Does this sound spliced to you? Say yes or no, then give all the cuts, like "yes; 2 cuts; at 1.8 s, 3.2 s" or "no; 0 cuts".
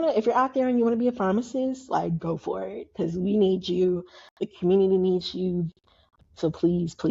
yes; 1 cut; at 6.0 s